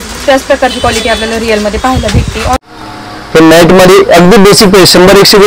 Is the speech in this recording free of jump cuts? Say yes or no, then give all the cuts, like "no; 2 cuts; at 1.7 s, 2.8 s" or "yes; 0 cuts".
no; 1 cut; at 2.6 s